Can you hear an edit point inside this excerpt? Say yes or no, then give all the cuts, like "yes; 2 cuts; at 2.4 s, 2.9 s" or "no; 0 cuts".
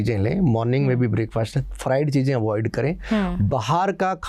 no; 0 cuts